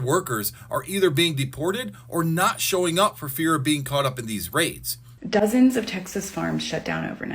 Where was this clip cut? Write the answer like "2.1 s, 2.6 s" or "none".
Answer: 5.2 s